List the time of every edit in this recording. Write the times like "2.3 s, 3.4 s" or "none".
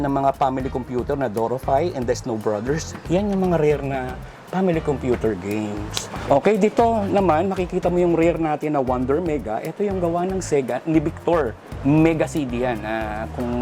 6.2 s, 11.6 s